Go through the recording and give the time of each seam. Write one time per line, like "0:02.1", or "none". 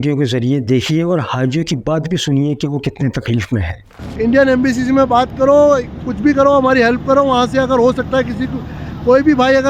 0:04.1